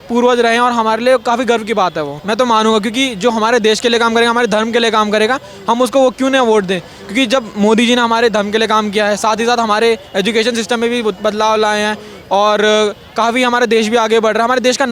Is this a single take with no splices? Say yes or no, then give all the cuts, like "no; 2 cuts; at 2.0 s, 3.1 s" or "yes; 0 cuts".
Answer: no; 1 cut; at 2.2 s